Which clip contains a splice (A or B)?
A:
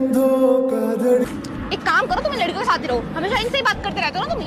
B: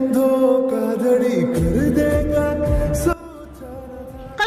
A